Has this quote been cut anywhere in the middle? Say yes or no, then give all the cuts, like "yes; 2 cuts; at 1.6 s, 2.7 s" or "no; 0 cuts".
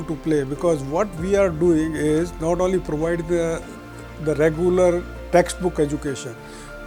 no; 0 cuts